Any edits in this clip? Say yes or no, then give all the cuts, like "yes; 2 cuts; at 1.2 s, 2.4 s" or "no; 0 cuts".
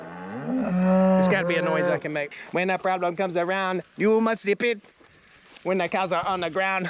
yes; 1 cut; at 2.3 s